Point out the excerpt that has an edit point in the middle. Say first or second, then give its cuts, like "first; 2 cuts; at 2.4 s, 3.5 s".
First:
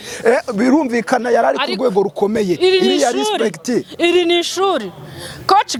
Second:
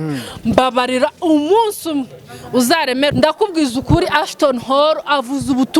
second; 1 cut; at 3.1 s